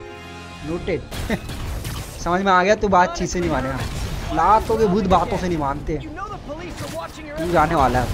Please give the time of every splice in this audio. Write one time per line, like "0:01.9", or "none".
none